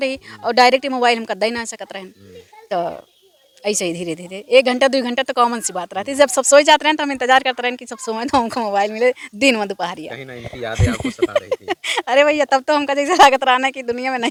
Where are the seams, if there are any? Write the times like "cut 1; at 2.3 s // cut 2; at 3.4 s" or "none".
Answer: none